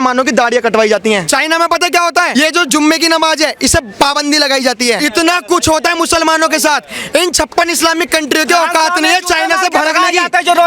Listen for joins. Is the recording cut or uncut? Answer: cut